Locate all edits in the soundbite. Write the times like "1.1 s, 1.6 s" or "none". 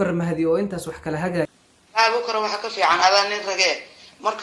1.5 s